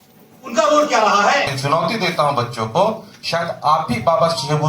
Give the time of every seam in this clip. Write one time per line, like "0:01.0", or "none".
0:01.6